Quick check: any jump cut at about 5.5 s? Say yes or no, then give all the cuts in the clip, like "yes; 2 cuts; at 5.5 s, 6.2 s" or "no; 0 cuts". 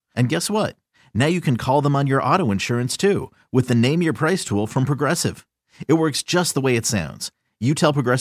no; 0 cuts